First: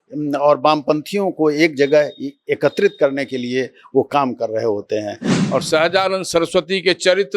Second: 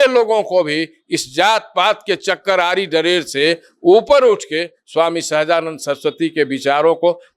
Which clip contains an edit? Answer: first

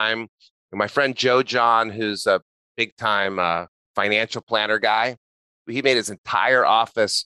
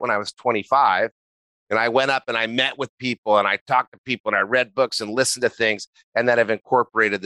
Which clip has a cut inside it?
first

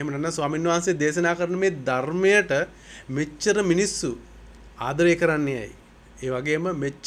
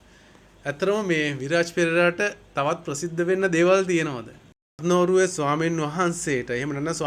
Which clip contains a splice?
second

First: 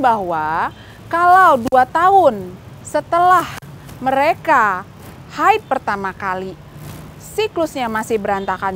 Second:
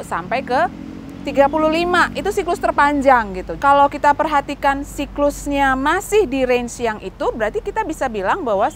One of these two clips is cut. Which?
second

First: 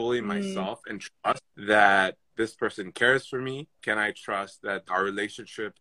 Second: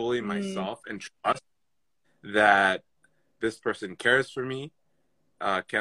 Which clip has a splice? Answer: first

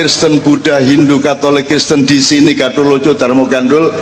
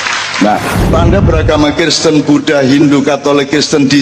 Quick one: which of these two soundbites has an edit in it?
second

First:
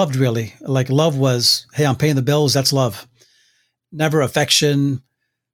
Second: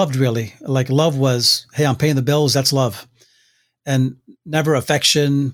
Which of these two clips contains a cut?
first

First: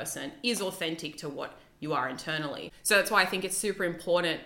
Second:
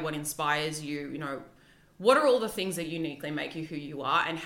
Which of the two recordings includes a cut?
first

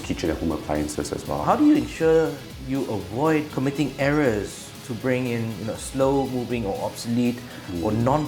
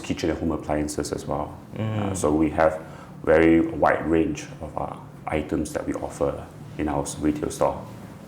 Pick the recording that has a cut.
first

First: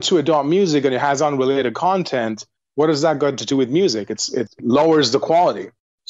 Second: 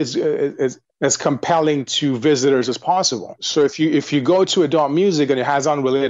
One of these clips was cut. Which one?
second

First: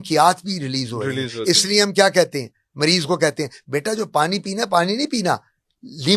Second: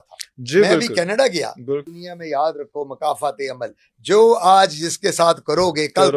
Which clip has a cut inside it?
second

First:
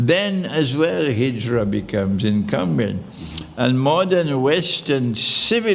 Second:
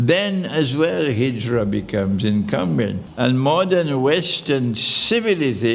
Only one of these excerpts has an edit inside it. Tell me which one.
second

